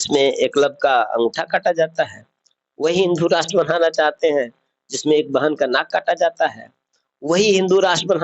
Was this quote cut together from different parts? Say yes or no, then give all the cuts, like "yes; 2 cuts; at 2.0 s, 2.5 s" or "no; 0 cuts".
no; 0 cuts